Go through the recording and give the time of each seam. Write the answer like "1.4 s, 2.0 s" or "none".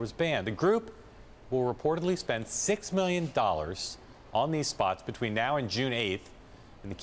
2.5 s